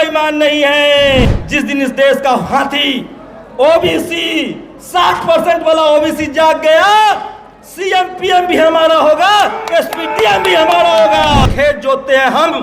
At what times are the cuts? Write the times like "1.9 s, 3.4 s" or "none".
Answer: 1.4 s, 11.5 s